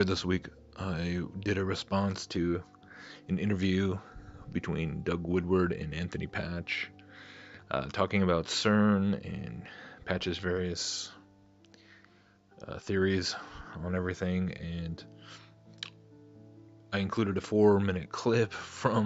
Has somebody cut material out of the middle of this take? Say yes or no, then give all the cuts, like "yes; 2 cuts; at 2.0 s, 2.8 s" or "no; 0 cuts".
no; 0 cuts